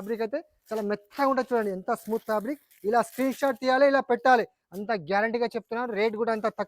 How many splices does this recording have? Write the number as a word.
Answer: one